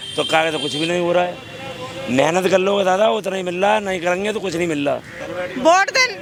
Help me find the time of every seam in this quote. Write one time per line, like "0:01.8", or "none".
none